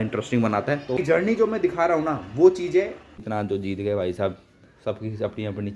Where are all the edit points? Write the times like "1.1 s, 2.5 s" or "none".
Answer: 1.0 s, 3.1 s